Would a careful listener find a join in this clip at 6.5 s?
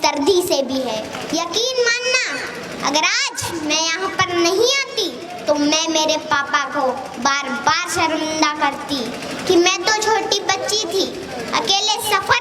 no; 1 cut; at 1.2 s

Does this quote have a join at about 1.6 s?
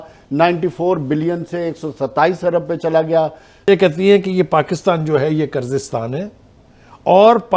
no; 1 cut; at 3.7 s

